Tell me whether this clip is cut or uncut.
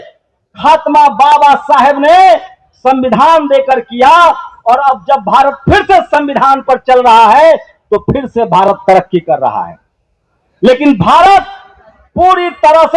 uncut